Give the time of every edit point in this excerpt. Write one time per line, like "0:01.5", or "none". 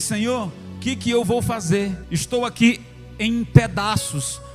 0:02.1

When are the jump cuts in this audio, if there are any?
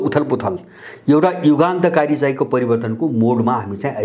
none

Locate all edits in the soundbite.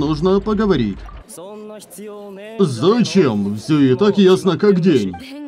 none

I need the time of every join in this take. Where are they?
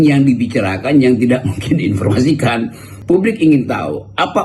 0:02.9

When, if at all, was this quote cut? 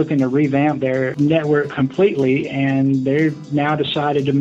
0:01.1

